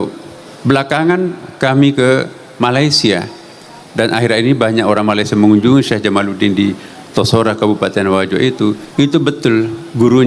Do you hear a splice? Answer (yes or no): no